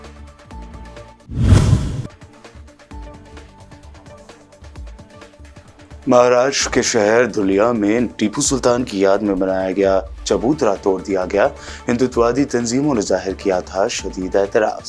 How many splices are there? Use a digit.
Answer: 1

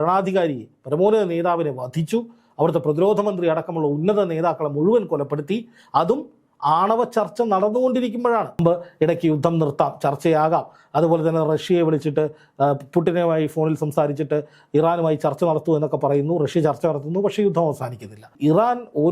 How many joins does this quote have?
2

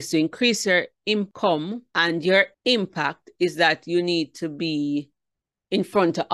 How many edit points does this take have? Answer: 2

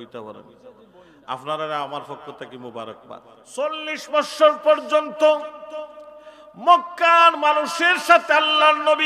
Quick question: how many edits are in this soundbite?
1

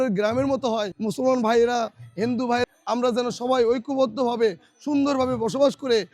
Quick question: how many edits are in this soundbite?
2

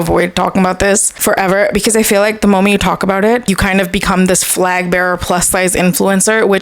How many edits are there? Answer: 2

